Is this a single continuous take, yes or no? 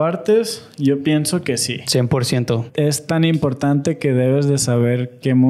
no